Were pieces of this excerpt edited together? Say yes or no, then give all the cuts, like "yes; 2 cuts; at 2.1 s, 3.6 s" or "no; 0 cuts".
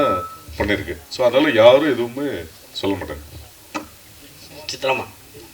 no; 0 cuts